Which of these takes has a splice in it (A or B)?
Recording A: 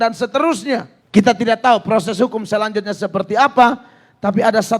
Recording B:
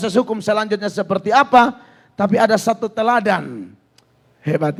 A